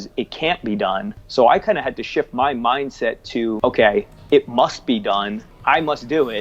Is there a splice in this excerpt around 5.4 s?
yes; 3 cuts; at 1.2 s, 3.6 s, 5.4 s

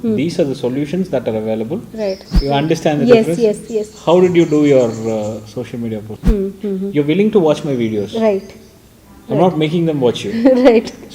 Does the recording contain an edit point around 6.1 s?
yes; 2 cuts; at 2.2 s, 6.1 s

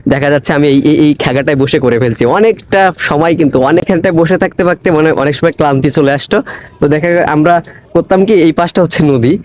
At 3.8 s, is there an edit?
yes; 1 cut; at 3.8 s

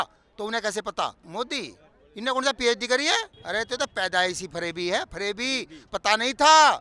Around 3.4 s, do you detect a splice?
yes; 2 cuts; at 1.2 s, 3.4 s

